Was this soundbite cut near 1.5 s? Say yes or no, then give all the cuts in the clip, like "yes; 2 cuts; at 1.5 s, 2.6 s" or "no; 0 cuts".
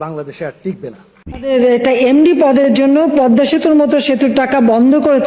yes; 1 cut; at 1.5 s